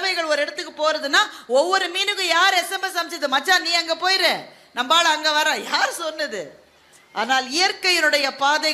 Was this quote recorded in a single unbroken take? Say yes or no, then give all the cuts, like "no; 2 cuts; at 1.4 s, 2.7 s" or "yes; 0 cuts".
yes; 0 cuts